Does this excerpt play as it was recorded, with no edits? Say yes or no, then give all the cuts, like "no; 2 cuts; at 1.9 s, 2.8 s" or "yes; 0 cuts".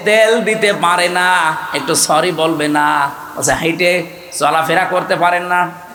yes; 0 cuts